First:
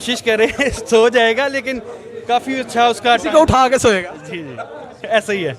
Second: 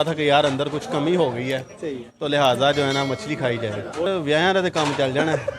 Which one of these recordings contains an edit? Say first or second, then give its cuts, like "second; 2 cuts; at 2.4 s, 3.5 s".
second; 1 cut; at 4.1 s